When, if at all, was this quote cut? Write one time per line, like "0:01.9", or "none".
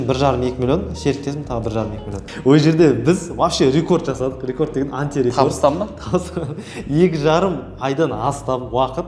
0:02.1